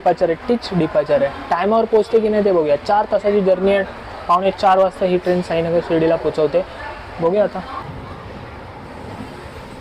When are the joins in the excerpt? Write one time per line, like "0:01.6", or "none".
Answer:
0:07.8